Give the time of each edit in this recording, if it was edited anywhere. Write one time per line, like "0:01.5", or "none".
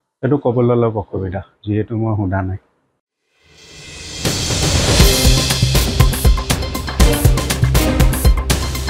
0:02.8